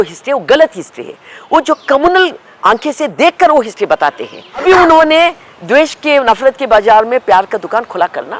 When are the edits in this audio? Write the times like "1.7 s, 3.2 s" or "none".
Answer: 4.6 s